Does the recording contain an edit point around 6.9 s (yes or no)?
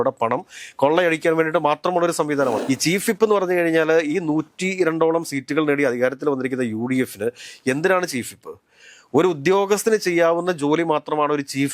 no